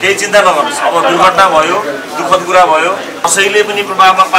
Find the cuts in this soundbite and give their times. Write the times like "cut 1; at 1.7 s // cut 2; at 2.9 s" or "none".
cut 1; at 3.3 s